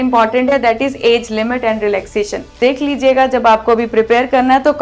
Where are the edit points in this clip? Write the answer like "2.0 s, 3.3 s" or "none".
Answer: 2.6 s